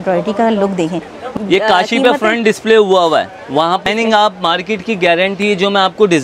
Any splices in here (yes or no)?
yes